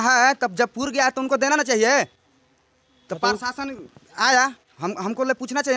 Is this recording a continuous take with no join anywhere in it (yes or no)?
yes